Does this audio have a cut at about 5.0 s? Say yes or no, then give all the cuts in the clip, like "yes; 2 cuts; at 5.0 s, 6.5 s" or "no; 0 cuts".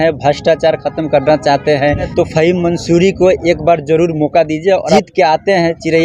yes; 2 cuts; at 2.1 s, 5.0 s